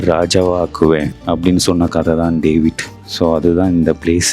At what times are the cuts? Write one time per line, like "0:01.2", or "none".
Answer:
0:01.1

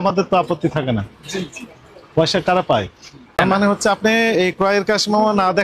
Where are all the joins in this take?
0:03.4

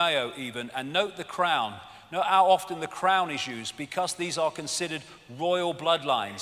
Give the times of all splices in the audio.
0:05.5

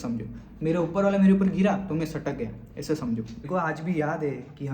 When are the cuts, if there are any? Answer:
0:03.4

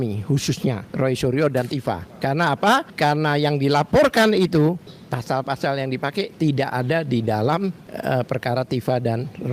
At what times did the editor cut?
0:00.9
0:02.1
0:02.9
0:04.9
0:07.9

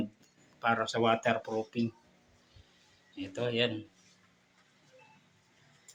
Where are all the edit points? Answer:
none

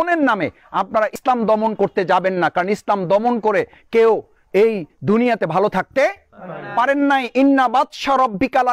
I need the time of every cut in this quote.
0:01.1

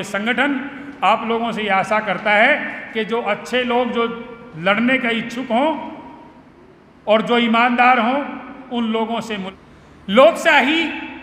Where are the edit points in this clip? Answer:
0:09.5

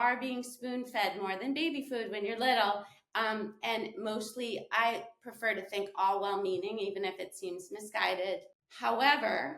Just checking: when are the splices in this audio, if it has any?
0:08.6

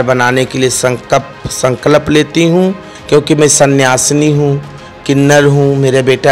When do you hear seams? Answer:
0:02.9

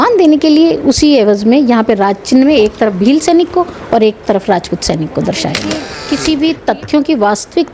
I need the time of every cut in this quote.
0:05.9

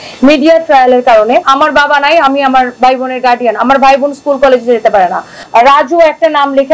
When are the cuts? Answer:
0:01.4
0:05.3

